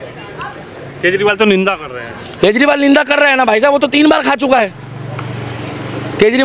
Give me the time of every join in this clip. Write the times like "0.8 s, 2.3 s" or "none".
none

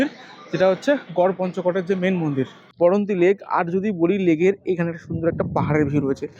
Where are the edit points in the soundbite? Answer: 2.6 s

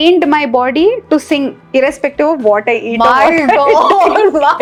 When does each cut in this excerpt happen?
none

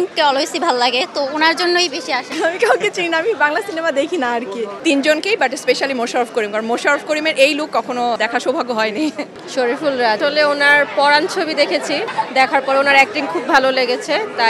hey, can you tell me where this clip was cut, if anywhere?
2.3 s, 4.7 s, 8.2 s, 9.3 s, 10.2 s, 12.1 s

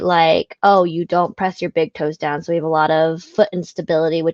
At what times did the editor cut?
none

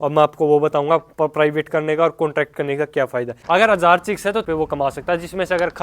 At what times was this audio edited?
3.4 s, 4.4 s

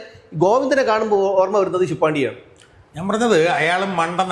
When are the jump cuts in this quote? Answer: none

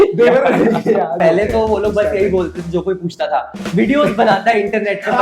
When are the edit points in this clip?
1.2 s

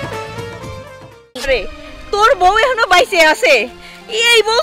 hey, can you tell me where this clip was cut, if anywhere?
1.5 s

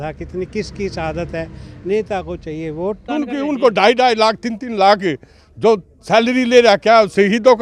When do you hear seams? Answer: 3.1 s

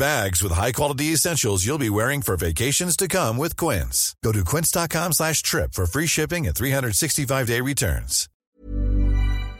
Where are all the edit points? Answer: 8.5 s

